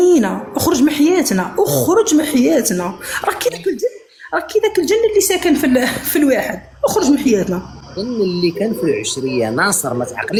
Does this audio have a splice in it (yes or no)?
no